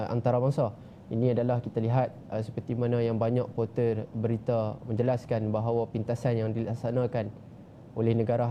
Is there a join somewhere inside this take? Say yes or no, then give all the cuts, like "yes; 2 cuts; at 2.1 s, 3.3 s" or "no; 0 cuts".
no; 0 cuts